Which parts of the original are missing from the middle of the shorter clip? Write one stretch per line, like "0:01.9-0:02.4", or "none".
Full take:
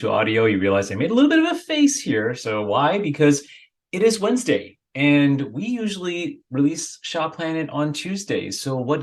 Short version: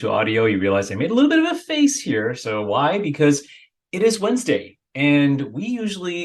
none